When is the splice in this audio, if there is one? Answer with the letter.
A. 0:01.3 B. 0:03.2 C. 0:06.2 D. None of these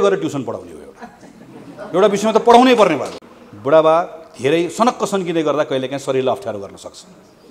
B